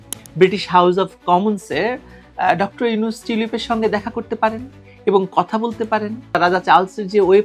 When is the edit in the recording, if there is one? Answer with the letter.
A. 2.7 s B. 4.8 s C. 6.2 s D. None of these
C